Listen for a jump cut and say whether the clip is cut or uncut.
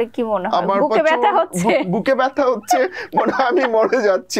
uncut